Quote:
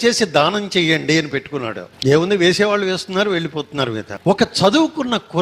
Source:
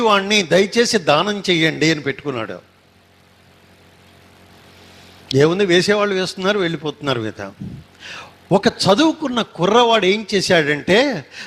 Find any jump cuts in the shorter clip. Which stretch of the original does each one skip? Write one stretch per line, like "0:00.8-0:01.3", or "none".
0:02.6-0:05.1
0:07.4-0:08.3

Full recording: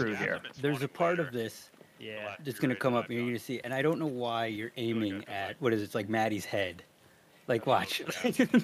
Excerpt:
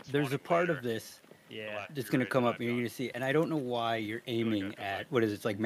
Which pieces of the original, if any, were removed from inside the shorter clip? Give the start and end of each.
none

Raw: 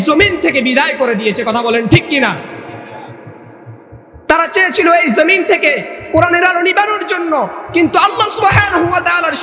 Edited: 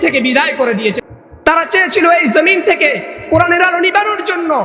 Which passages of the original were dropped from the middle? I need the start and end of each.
0:01.4-0:03.8

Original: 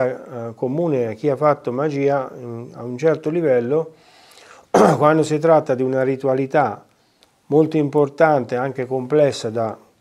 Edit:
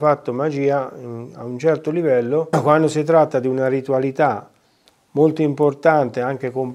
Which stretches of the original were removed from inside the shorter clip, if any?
0:03.9-0:04.9

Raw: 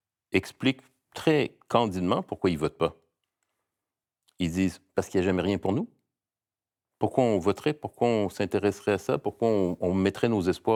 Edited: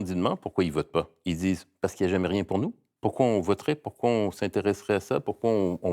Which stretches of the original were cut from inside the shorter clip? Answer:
0:03.0-0:04.3
0:06.0-0:06.8

